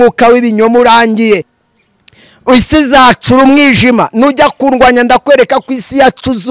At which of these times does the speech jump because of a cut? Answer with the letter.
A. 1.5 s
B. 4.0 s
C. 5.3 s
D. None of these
A